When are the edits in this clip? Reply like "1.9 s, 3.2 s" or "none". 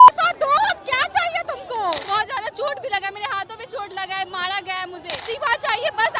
2.0 s, 5.2 s